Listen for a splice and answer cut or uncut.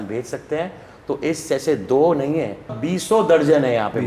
cut